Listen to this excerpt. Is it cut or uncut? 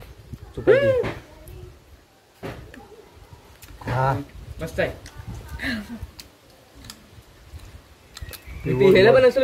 uncut